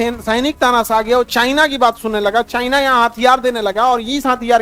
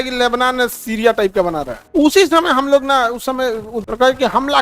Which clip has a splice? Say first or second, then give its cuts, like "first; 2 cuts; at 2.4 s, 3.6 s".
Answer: second; 2 cuts; at 1.9 s, 3.8 s